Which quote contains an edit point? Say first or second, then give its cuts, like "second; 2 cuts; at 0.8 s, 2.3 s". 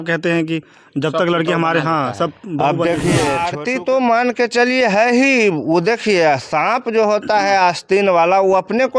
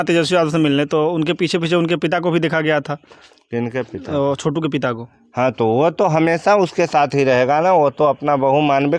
first; 1 cut; at 3.5 s